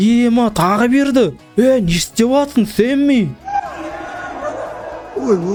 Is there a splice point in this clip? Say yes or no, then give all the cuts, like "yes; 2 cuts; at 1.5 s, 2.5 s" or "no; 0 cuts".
no; 0 cuts